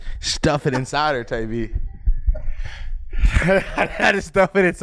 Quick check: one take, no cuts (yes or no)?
yes